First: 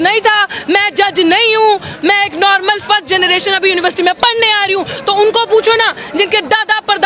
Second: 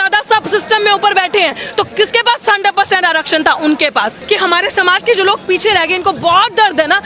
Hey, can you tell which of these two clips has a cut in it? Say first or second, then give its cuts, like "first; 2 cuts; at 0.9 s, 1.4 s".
second; 1 cut; at 4.2 s